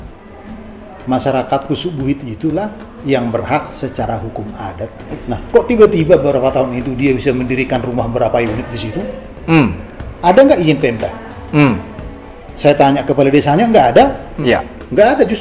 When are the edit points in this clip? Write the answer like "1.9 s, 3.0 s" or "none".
5.1 s, 14.4 s